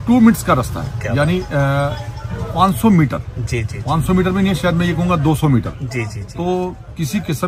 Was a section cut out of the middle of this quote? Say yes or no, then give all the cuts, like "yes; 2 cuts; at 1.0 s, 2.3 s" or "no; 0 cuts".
no; 0 cuts